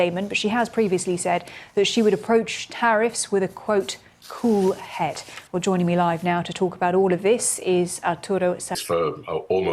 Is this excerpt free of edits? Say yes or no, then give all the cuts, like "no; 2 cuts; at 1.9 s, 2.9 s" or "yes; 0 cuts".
no; 1 cut; at 8.7 s